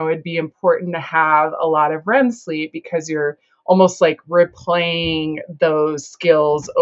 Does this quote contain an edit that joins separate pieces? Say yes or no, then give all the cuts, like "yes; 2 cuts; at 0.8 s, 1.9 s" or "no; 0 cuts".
no; 0 cuts